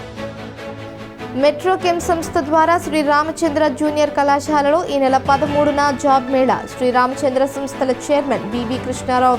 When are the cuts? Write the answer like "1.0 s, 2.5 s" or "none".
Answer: none

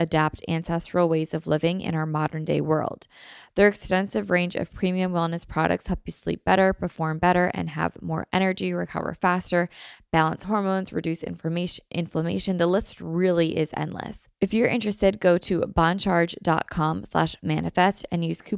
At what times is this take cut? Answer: 14.2 s

